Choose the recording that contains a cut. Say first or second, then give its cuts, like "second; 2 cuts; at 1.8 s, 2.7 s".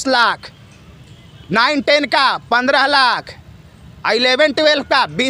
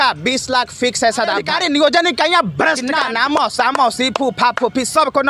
second; 2 cuts; at 1.5 s, 2.9 s